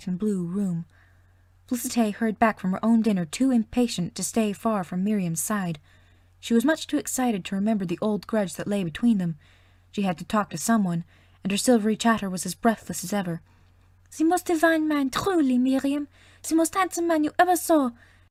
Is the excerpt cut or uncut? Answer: uncut